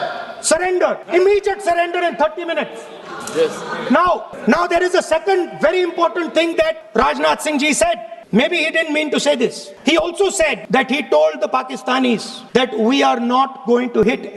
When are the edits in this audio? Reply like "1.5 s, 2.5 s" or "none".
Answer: 1.0 s, 4.3 s, 6.8 s, 8.1 s, 9.7 s, 10.6 s, 12.3 s